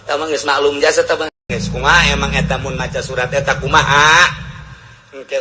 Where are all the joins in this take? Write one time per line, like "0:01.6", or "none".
0:01.5